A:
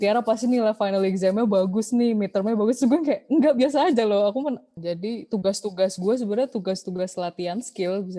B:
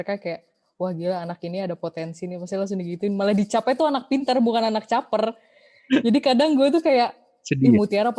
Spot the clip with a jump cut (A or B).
A